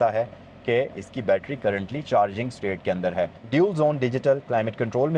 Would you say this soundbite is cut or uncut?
cut